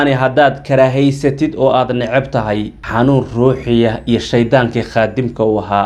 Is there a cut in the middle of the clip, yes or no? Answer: no